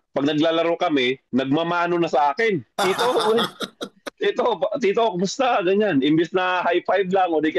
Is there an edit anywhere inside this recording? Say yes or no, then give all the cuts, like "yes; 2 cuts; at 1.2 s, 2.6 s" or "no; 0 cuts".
no; 0 cuts